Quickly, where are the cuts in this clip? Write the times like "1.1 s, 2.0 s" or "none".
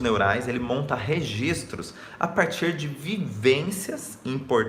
none